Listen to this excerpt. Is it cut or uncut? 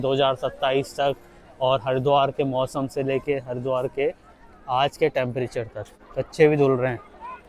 cut